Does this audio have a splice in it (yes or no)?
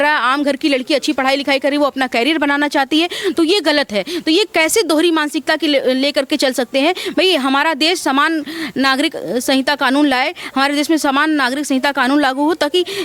no